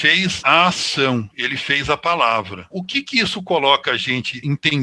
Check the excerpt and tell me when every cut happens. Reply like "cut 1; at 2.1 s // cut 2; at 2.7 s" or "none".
cut 1; at 2.6 s